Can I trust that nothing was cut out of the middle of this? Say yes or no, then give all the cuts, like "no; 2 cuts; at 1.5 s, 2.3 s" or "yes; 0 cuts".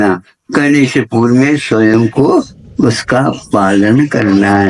yes; 0 cuts